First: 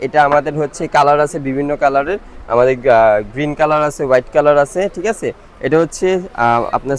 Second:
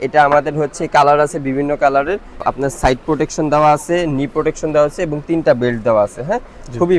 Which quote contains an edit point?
second; 1 cut; at 2.4 s

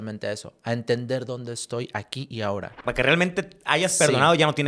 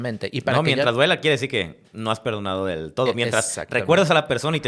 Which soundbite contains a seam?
first; 1 cut; at 2.8 s

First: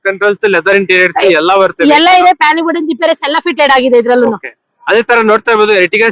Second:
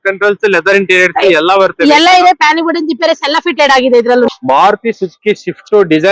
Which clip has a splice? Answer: second; 1 cut; at 4.4 s

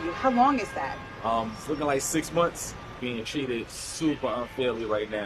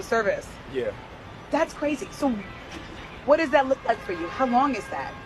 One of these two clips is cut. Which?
first; 1 cut; at 3.0 s

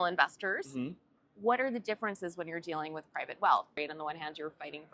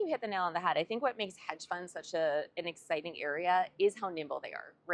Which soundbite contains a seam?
first; 1 cut; at 3.7 s

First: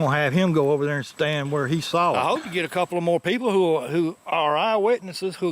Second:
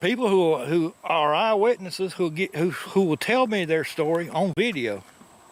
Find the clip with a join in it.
first; 1 cut; at 2.2 s

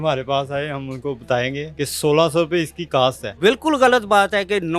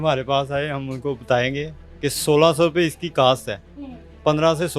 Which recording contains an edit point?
first; 2 cuts; at 1.7 s, 3.4 s

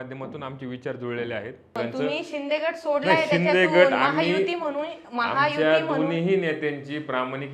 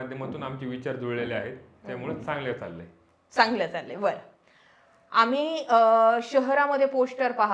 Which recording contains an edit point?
first; 1 cut; at 1.7 s

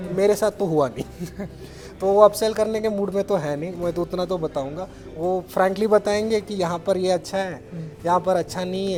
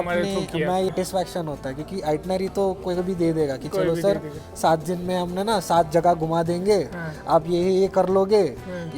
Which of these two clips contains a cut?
second; 1 cut; at 0.9 s

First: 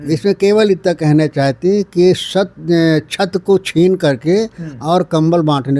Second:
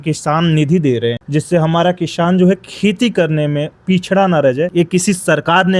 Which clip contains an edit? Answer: second; 2 cuts; at 1.2 s, 4.7 s

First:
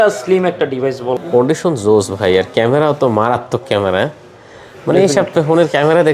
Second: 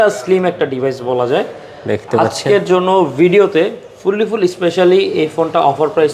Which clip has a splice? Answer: first; 1 cut; at 1.2 s

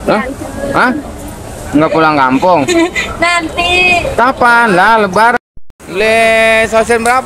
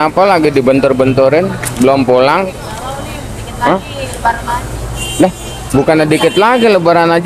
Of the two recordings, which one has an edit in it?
first; 1 cut; at 5.3 s

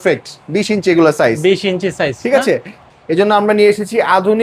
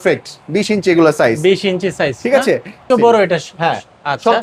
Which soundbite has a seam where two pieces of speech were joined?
first; 1 cut; at 2.8 s

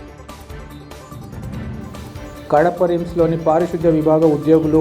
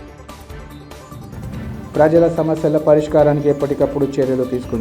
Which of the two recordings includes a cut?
second; 1 cut; at 1.4 s

